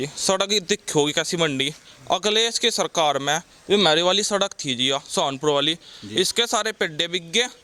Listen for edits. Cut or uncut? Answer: uncut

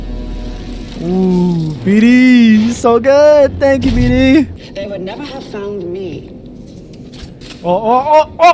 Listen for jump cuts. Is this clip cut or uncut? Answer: cut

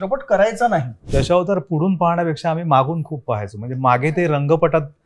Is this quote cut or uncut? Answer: cut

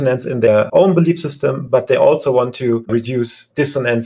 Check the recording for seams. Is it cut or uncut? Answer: cut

